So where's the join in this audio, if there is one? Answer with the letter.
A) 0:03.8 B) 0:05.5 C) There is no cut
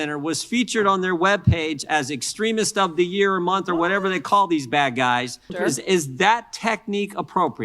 B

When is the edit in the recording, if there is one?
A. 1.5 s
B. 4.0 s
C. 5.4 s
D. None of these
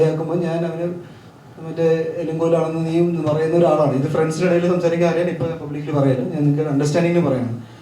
D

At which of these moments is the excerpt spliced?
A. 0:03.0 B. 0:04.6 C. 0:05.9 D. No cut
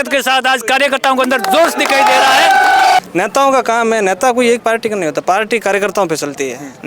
A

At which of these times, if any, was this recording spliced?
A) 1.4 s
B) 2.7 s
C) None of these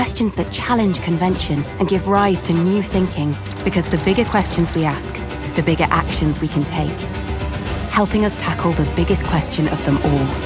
C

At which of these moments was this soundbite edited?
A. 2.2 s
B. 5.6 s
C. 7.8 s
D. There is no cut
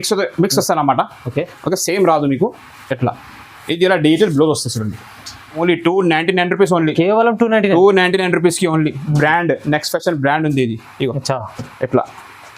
B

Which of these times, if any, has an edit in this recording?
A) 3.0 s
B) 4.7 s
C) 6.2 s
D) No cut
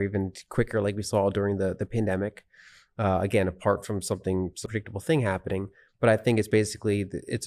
B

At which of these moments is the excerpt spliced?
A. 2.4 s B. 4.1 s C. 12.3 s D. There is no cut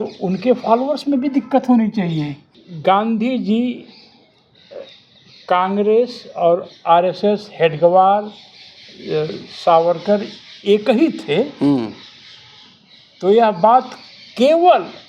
A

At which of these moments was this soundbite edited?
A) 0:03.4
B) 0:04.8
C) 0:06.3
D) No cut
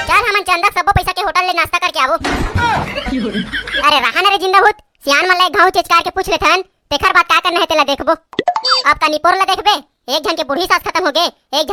D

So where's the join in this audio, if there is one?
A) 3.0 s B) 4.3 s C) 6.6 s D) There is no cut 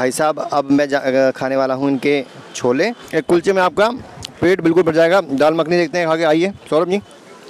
A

